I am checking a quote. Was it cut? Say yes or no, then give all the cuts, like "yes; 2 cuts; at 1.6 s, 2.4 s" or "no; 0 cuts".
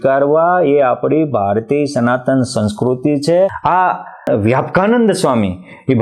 no; 0 cuts